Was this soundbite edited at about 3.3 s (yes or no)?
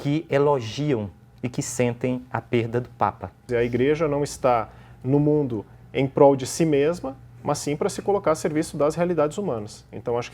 yes